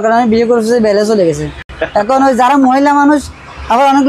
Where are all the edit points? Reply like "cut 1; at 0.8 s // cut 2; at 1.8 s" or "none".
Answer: none